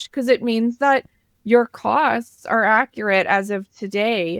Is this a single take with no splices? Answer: yes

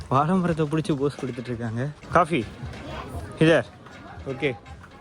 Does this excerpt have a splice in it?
yes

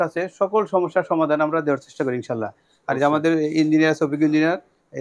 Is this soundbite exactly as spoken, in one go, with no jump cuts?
yes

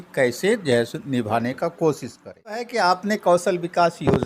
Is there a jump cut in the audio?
yes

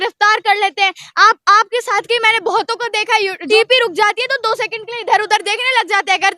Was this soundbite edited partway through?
yes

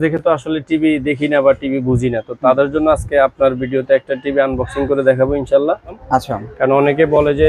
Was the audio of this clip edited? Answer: yes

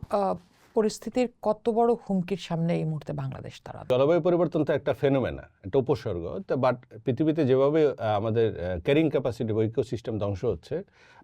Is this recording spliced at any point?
yes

